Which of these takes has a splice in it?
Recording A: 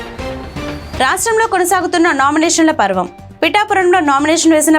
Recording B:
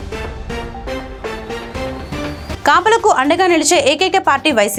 A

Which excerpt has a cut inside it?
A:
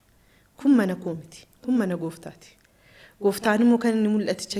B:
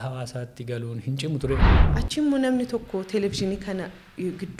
B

